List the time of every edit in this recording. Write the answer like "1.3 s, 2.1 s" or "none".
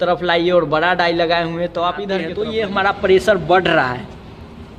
2.3 s